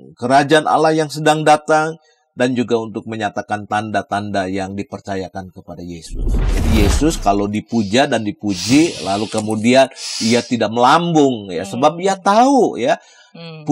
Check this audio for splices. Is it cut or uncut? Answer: cut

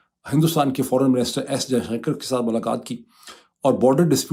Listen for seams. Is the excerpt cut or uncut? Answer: uncut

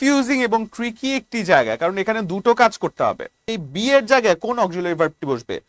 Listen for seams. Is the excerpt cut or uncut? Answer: cut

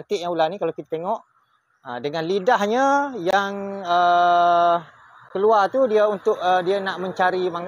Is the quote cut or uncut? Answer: uncut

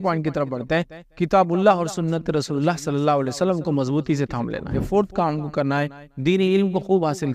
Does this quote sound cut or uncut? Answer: cut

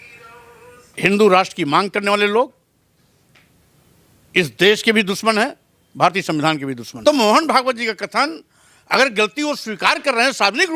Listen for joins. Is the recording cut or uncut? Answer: cut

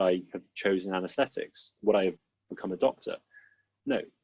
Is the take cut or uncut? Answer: uncut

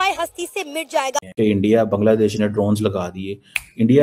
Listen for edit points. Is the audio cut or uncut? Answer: cut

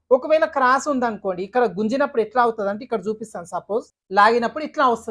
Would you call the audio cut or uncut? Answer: cut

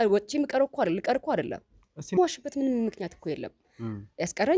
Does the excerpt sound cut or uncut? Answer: cut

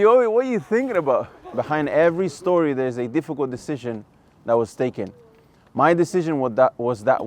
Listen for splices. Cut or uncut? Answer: cut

